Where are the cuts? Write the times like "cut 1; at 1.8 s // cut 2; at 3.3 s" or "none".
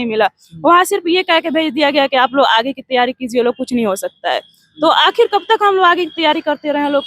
none